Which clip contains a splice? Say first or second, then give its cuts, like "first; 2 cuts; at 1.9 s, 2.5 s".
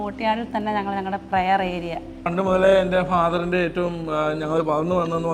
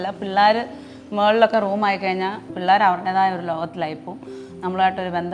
second; 1 cut; at 2.5 s